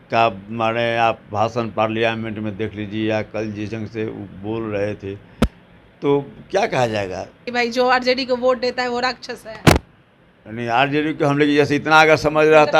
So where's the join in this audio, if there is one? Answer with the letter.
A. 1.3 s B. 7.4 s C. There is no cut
B